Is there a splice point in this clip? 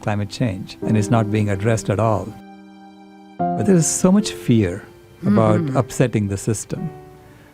yes; 1 cut; at 3.6 s

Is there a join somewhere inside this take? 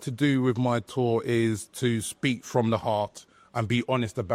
no; 0 cuts

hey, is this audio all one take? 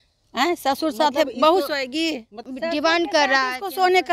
no; 1 cut; at 2.4 s

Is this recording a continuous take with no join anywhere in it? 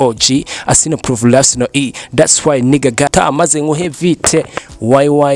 no; 1 cut; at 3.1 s

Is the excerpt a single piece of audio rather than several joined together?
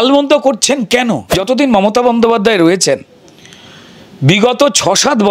no; 1 cut; at 1.4 s

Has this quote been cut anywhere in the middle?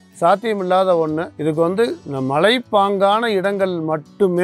yes; 2 cuts; at 1.3 s, 2.0 s

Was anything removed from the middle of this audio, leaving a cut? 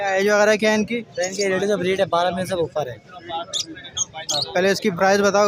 no; 0 cuts

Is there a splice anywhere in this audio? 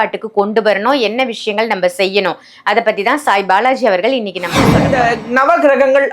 yes; 1 cut; at 4.8 s

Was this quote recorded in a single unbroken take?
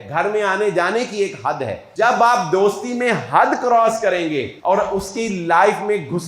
no; 2 cuts; at 1.8 s, 4.5 s

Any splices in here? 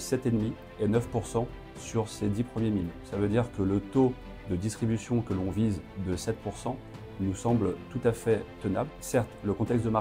yes; 2 cuts; at 3.1 s, 8.9 s

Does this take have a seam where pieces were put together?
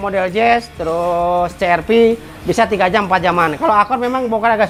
no; 0 cuts

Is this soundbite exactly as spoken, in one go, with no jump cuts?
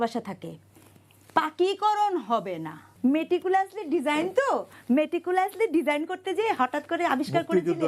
no; 1 cut; at 2.9 s

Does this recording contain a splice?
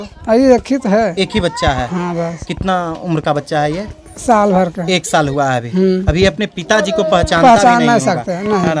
no; 0 cuts

